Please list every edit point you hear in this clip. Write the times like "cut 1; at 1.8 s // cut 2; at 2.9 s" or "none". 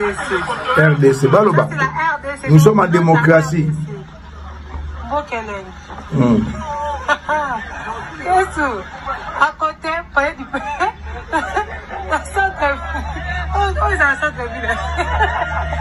none